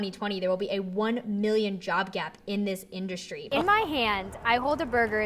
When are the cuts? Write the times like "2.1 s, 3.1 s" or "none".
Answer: 3.5 s